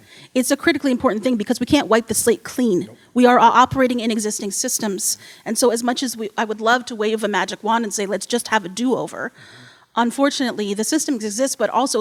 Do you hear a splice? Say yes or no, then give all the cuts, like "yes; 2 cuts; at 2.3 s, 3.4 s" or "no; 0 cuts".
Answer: no; 0 cuts